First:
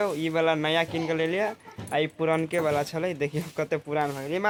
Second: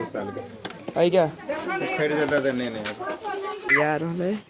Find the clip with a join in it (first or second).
second